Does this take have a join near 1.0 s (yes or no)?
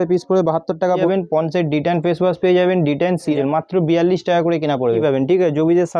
yes